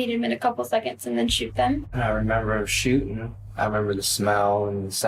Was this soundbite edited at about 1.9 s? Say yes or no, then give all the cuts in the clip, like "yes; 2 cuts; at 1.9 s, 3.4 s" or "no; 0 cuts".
yes; 1 cut; at 1.9 s